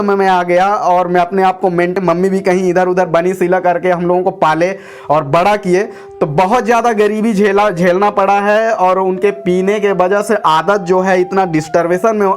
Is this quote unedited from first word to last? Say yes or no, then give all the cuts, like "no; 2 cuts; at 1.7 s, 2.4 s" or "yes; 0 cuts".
no; 2 cuts; at 2.0 s, 6.0 s